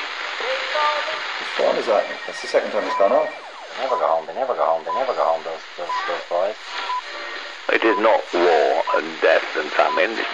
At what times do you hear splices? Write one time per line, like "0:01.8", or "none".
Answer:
0:07.2